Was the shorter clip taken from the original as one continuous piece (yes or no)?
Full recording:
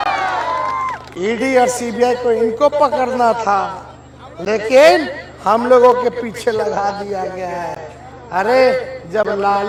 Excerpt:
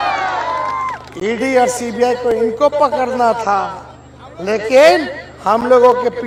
yes